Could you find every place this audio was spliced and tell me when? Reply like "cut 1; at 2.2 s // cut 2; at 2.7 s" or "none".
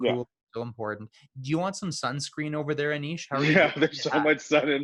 none